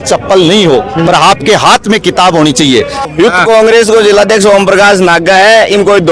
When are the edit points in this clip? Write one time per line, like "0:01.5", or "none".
0:03.1